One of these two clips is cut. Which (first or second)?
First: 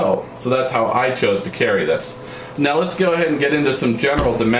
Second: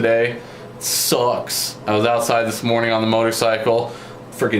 second